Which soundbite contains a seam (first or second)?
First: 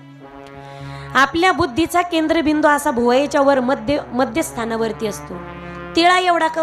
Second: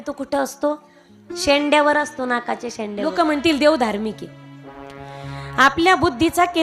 second